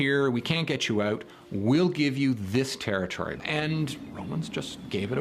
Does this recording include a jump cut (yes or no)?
yes